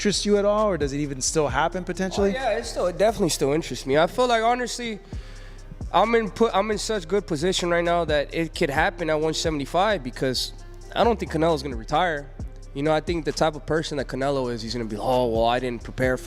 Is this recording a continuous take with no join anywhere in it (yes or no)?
yes